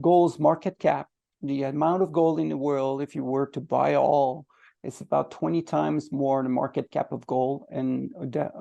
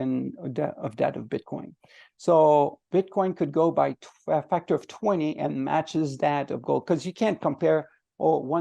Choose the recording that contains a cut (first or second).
second